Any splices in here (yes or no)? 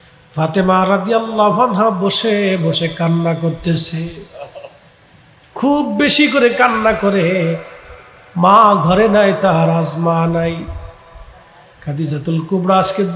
no